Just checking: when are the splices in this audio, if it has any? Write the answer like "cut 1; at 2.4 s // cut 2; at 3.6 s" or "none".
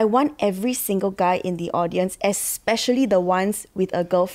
none